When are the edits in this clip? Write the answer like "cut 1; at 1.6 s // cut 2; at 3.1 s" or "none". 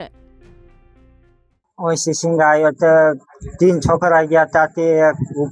cut 1; at 1.4 s